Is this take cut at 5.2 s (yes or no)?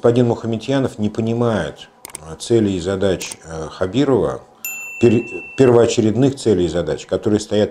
no